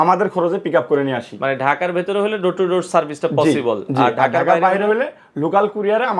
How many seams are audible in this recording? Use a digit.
0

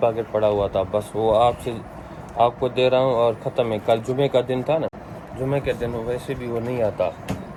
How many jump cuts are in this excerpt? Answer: 0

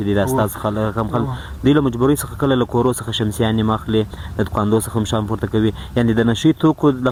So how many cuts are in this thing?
0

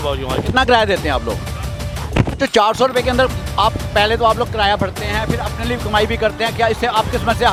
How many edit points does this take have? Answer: 0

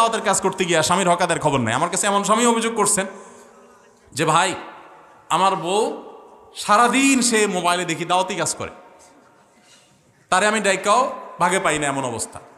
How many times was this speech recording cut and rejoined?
0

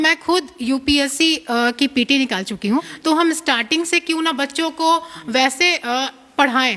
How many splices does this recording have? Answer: 1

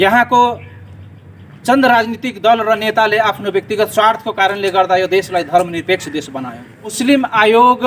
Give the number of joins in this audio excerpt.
1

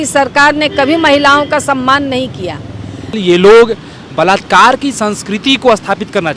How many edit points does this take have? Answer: 1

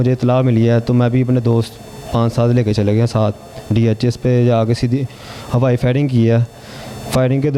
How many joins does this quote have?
0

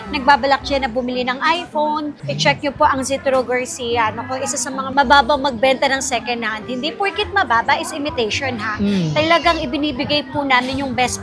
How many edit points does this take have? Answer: 0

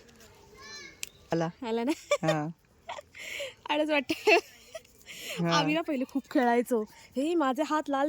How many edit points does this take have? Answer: 1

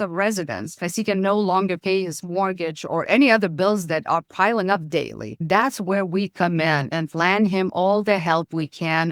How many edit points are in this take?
1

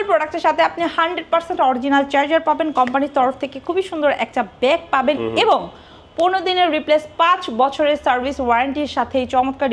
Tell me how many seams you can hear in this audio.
0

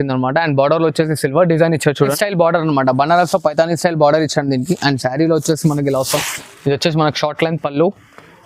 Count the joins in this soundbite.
1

